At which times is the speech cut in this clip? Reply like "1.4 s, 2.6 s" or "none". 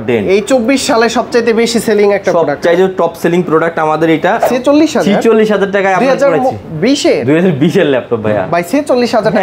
4.4 s

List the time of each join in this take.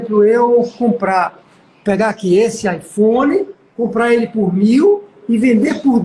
none

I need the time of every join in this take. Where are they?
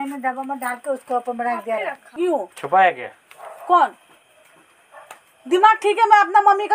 2.1 s

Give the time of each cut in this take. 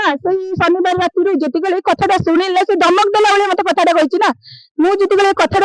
none

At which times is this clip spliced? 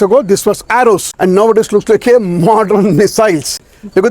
1.1 s

